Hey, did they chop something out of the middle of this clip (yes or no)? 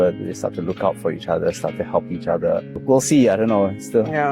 yes